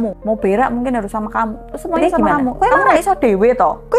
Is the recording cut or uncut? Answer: cut